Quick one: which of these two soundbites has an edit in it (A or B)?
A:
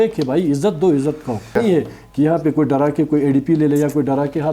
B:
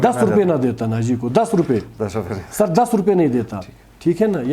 A